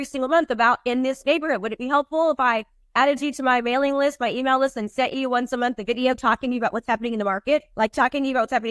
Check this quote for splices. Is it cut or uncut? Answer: cut